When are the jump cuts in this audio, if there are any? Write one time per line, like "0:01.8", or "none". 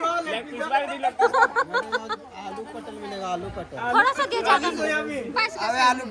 none